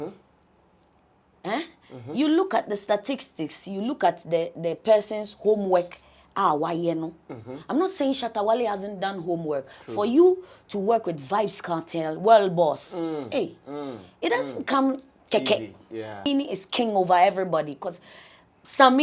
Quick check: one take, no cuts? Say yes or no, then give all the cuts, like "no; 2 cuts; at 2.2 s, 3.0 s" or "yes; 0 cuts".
no; 1 cut; at 16.3 s